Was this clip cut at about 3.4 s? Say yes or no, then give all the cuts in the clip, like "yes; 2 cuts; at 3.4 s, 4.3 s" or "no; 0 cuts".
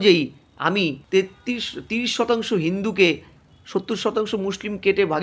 no; 1 cut; at 1.0 s